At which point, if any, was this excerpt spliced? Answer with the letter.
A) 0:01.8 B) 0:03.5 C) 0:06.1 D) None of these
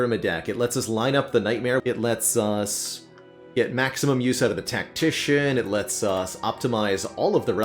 A